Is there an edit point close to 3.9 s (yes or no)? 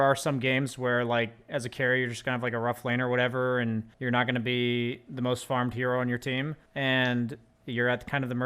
yes